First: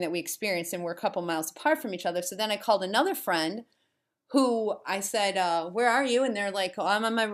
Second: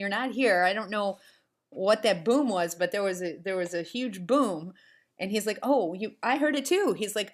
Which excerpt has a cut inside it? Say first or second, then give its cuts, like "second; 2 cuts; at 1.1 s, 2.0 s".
first; 1 cut; at 2.1 s